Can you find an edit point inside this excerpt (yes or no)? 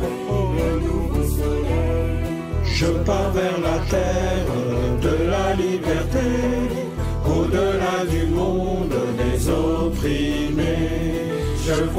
no